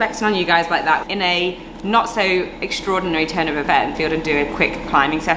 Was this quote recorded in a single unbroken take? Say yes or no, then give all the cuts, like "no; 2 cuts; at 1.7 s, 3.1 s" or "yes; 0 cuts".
no; 2 cuts; at 1.1 s, 4.0 s